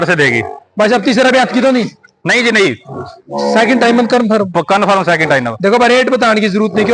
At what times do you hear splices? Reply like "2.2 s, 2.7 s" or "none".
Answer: none

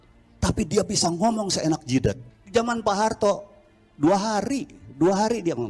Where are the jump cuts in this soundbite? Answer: 2.3 s

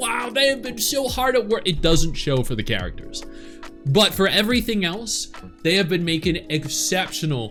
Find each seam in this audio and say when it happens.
none

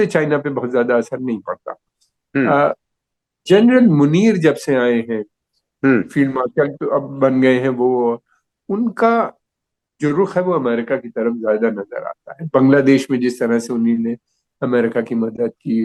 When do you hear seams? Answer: none

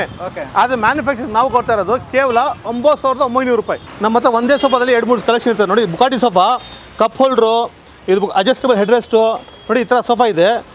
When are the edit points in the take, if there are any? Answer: 3.8 s

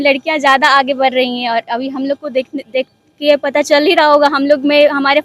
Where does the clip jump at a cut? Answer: none

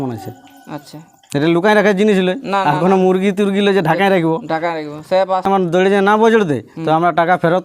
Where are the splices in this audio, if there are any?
5.4 s

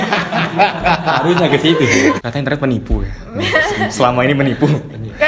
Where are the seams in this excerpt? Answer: 2.2 s

